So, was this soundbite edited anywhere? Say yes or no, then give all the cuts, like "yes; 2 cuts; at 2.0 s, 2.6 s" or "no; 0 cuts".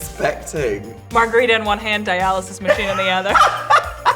yes; 1 cut; at 0.9 s